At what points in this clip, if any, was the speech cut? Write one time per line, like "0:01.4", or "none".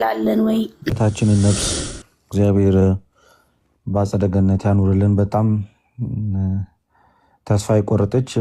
0:00.9